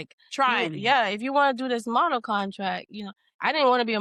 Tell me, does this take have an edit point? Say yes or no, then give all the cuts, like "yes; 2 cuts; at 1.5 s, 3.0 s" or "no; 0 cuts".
no; 0 cuts